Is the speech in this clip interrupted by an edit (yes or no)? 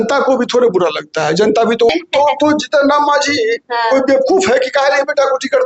yes